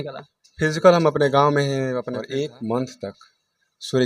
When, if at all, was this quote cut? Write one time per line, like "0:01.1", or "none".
0:02.2